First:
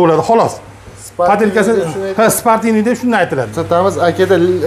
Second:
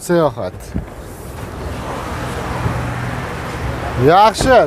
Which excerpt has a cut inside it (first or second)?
first